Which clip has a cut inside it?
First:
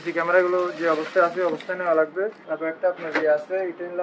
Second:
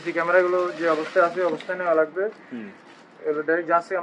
first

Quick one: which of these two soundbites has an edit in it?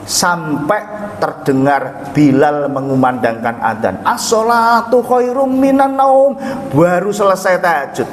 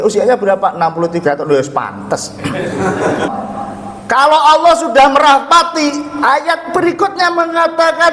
second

